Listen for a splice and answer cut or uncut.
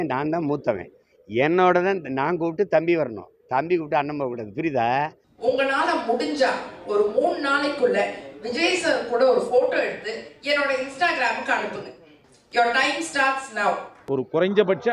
cut